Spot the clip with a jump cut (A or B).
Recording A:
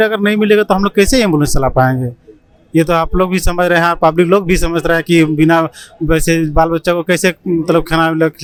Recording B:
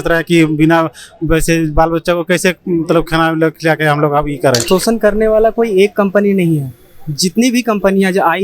B